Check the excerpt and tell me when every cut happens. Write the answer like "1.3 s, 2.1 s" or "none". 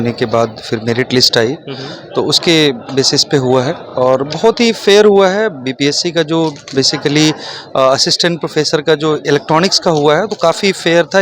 none